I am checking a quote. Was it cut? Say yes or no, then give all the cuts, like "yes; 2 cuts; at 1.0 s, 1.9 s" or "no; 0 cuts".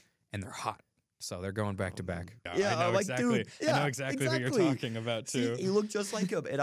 yes; 1 cut; at 2.4 s